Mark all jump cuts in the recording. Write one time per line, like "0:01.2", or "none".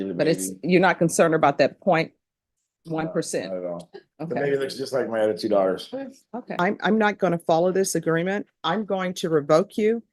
0:06.5